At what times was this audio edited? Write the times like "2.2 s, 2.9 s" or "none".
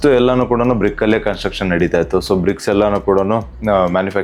none